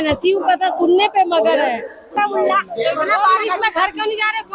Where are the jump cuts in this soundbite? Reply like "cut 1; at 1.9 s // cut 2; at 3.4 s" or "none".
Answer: cut 1; at 2.1 s